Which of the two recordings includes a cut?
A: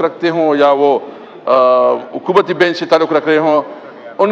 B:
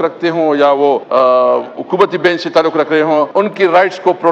B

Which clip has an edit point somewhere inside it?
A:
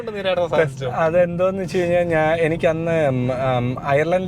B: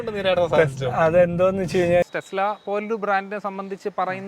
B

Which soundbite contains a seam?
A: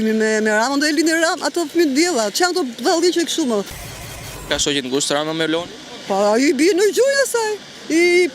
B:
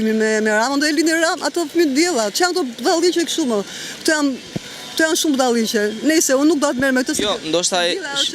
A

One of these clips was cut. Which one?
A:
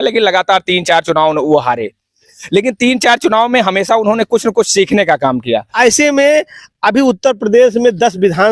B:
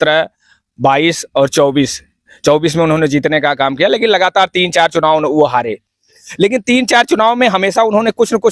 A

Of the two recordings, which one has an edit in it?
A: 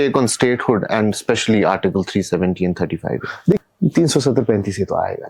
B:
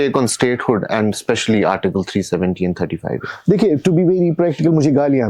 A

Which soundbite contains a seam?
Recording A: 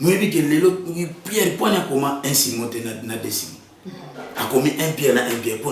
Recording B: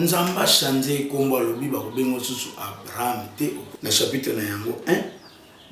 B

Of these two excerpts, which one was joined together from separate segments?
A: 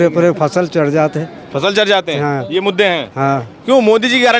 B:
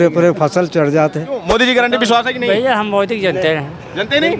B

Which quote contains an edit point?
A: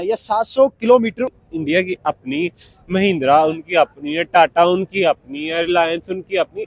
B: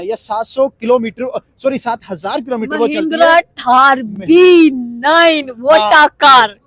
A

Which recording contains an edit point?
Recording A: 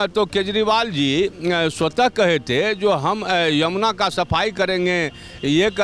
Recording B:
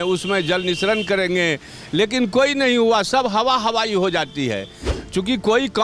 B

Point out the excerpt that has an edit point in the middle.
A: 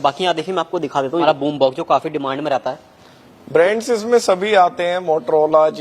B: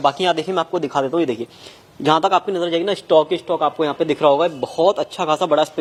A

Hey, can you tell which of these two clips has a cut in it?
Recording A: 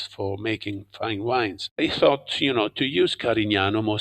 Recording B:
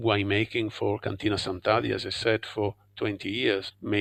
A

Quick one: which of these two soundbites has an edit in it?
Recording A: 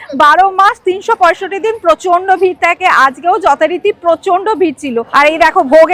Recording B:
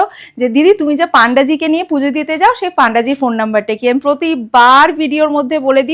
A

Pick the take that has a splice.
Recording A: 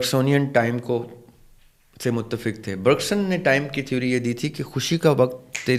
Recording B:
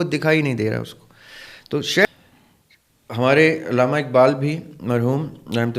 B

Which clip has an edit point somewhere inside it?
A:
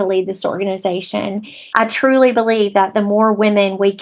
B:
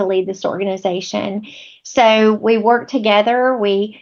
A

